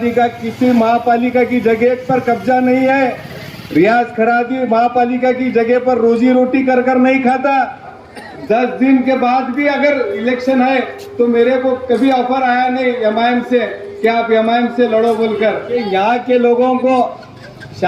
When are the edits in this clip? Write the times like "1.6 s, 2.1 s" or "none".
7.9 s, 15.7 s